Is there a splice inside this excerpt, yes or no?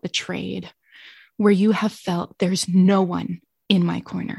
no